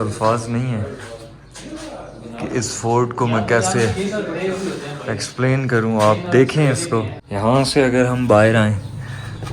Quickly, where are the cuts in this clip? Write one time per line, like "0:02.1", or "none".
0:07.2